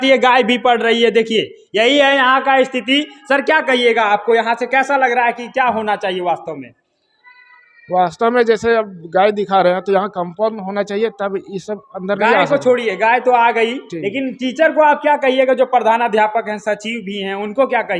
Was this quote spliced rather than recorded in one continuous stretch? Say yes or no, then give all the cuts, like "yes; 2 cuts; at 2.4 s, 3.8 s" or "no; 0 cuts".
no; 0 cuts